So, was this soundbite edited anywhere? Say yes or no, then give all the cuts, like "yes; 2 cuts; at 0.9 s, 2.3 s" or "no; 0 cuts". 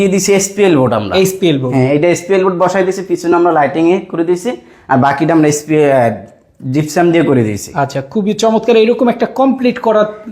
no; 0 cuts